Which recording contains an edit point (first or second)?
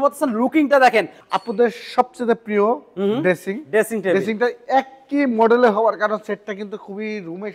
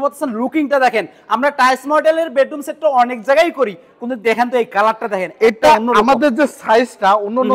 first